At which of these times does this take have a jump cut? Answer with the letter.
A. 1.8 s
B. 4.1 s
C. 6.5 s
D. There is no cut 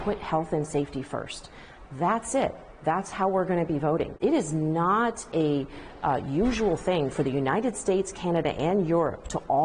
B